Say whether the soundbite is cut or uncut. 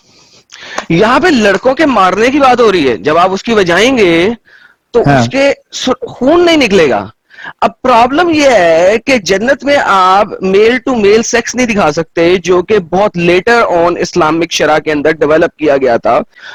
uncut